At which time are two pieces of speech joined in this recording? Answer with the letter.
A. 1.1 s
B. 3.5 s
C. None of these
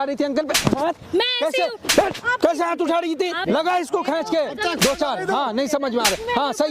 B